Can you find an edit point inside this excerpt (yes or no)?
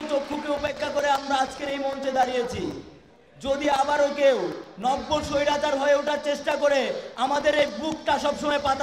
no